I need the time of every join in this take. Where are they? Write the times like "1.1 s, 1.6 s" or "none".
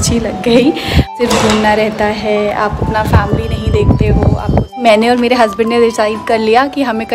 1.1 s, 4.8 s